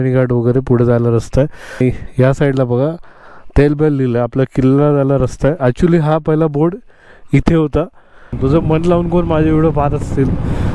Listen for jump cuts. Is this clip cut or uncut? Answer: cut